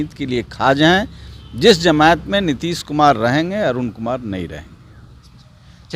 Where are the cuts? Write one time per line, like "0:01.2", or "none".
none